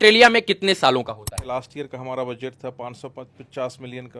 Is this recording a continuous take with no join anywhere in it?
no; 1 cut; at 1.4 s

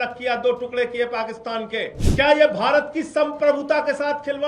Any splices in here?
yes; 1 cut; at 2.0 s

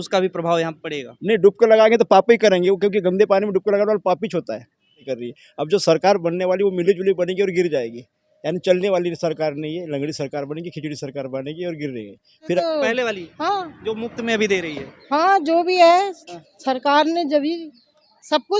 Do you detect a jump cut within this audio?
yes; 2 cuts; at 5.1 s, 12.6 s

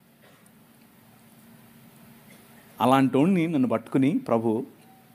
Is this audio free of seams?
yes; 0 cuts

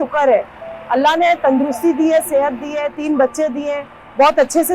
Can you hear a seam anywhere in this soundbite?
no; 0 cuts

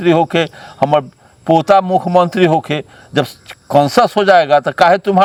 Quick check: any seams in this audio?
no; 0 cuts

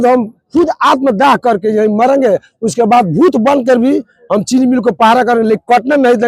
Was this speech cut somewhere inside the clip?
no; 0 cuts

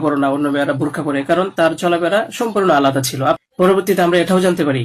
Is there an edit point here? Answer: yes; 1 cut; at 3.4 s

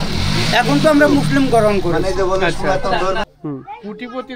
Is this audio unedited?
no; 1 cut; at 3.3 s

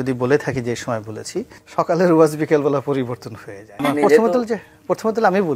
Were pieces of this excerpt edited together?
yes; 2 cuts; at 1.6 s, 3.8 s

